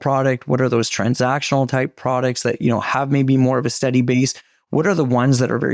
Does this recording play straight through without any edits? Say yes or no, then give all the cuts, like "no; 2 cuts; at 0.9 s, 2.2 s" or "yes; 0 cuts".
yes; 0 cuts